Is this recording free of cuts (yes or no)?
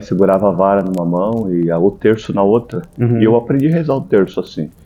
yes